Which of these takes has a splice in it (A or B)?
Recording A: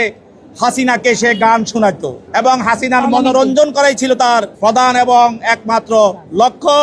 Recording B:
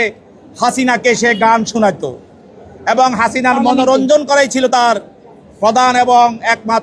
A